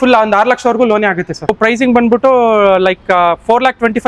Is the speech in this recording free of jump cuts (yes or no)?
no